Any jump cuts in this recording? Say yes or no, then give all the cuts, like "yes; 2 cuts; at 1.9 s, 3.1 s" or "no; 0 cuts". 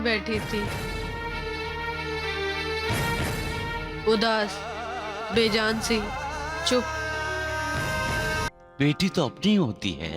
yes; 1 cut; at 8.5 s